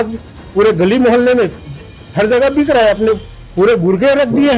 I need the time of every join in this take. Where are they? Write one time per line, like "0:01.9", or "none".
none